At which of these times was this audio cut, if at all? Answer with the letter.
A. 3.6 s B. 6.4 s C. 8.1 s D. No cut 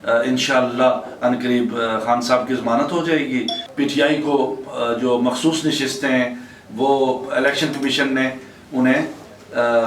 A